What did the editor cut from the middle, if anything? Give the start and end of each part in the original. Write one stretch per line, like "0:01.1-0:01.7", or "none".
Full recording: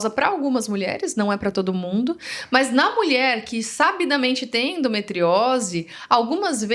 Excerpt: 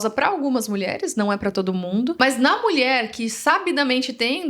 0:02.1-0:02.5